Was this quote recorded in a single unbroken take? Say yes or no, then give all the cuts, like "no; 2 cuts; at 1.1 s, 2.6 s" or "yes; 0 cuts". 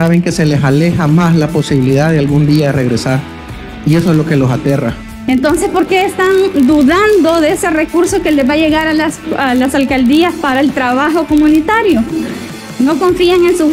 no; 1 cut; at 5.1 s